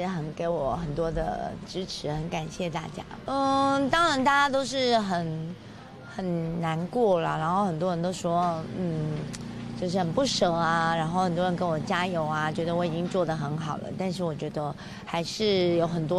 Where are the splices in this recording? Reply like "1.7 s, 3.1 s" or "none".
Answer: 3.1 s